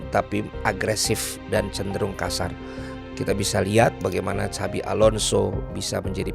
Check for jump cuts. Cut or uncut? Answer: uncut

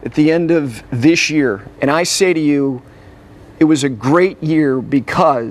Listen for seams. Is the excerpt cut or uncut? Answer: cut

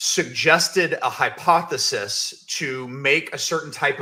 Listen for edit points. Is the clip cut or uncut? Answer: uncut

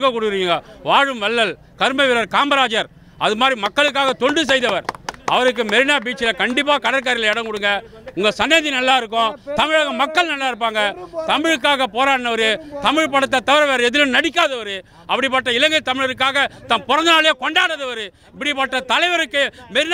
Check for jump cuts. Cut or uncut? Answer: uncut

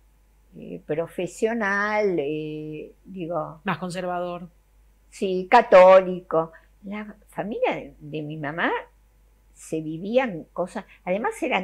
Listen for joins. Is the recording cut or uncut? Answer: uncut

